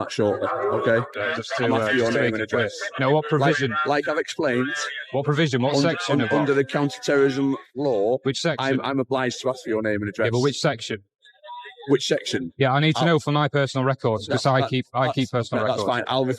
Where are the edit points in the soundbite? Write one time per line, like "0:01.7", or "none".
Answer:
0:01.2